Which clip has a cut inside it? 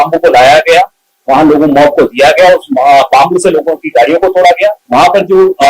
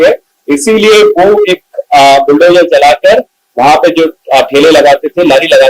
first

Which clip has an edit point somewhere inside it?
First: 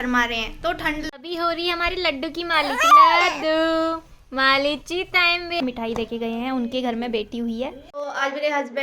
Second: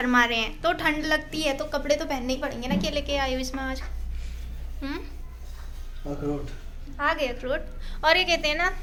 first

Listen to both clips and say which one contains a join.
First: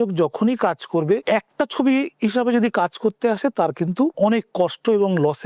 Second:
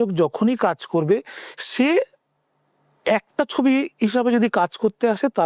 first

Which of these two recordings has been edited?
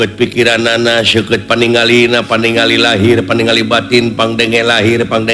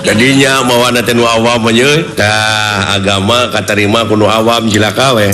second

